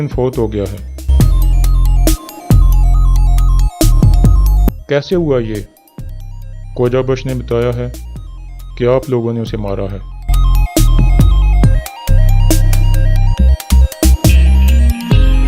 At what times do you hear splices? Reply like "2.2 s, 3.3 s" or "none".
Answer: 11.8 s